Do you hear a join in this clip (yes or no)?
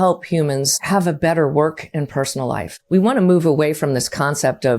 yes